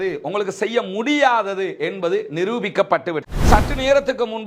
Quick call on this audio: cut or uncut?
cut